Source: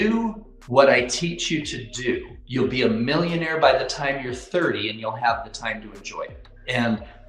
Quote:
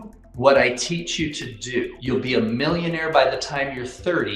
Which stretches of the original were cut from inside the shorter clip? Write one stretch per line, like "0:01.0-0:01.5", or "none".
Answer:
0:02.3-0:02.4